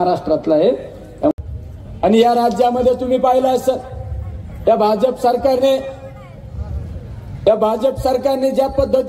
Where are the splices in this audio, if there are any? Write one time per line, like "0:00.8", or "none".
0:01.3